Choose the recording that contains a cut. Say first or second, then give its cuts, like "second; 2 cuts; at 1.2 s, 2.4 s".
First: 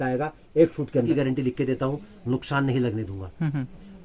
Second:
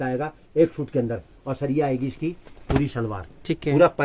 first; 1 cut; at 1.1 s